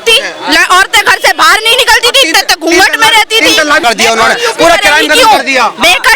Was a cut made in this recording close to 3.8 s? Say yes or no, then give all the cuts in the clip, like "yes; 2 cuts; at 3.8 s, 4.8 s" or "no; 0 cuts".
yes; 1 cut; at 3.8 s